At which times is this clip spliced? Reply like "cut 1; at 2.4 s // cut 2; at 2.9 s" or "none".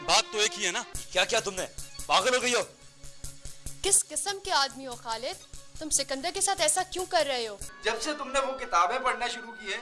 cut 1; at 0.9 s // cut 2; at 7.6 s